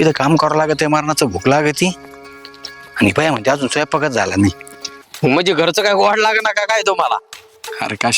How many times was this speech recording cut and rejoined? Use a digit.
1